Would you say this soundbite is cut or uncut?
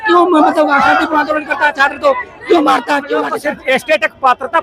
cut